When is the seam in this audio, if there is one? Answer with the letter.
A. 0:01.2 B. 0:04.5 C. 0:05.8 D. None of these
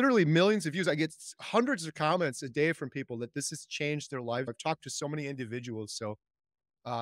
B